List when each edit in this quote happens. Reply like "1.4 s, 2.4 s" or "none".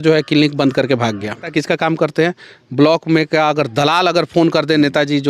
1.5 s